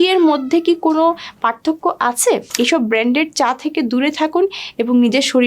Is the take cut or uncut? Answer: cut